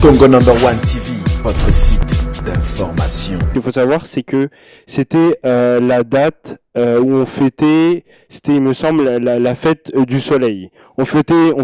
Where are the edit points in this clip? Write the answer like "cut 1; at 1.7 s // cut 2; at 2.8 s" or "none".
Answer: cut 1; at 3.5 s